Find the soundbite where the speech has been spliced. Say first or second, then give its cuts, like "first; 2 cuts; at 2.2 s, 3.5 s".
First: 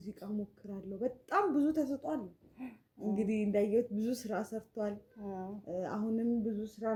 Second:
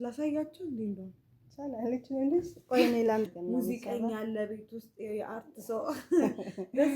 second; 1 cut; at 3.3 s